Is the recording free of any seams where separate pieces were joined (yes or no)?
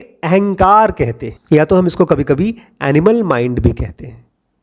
no